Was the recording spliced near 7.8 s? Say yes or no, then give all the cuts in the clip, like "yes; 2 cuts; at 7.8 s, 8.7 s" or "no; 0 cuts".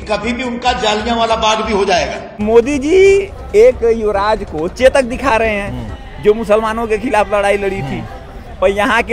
no; 1 cut; at 2.3 s